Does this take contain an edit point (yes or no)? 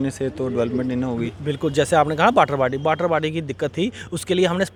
no